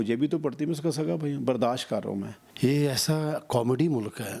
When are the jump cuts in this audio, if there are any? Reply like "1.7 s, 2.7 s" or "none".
2.4 s